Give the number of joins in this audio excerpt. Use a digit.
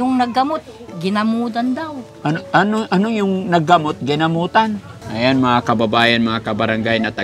1